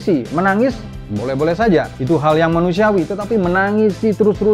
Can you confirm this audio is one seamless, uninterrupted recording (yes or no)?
no